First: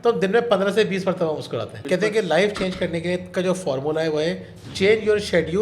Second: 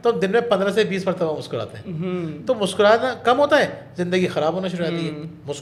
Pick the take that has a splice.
first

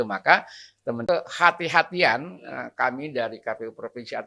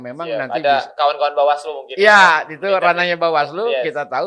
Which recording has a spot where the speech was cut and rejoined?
first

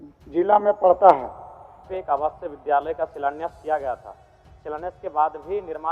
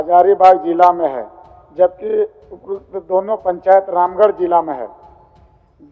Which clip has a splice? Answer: first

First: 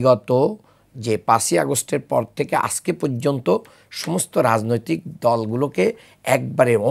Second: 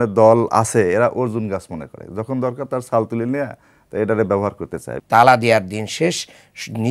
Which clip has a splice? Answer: second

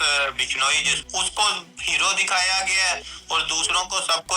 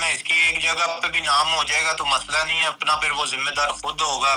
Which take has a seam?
first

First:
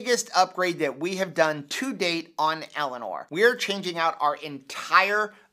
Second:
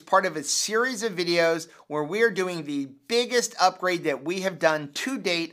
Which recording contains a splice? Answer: first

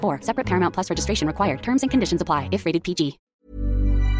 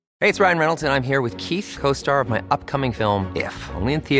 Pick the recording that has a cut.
first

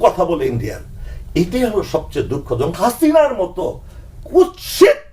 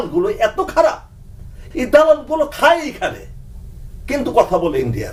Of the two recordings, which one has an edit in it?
first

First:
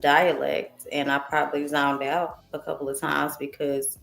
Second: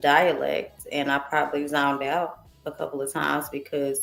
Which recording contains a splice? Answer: first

